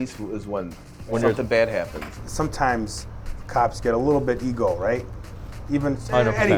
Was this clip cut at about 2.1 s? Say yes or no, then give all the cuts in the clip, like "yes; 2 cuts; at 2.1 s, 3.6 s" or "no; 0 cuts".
yes; 1 cut; at 2.1 s